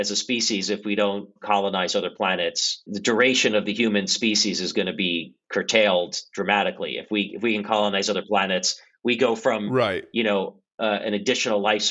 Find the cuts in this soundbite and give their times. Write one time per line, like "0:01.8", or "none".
none